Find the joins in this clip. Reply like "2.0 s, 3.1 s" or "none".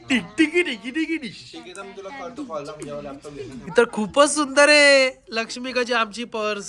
3.7 s